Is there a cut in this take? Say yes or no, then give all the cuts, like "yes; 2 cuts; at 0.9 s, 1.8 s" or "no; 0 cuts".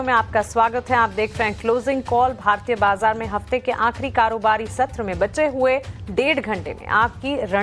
yes; 1 cut; at 1.1 s